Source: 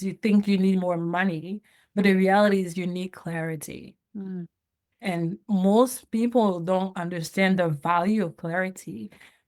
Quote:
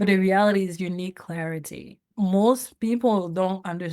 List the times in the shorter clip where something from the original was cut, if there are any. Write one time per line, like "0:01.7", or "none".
0:02.1